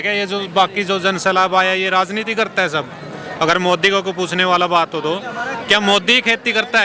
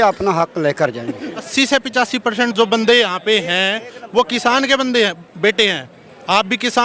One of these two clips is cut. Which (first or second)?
second